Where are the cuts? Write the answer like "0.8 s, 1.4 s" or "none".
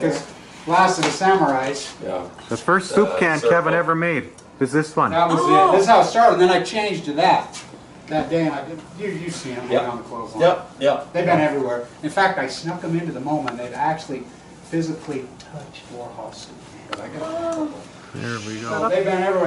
5.5 s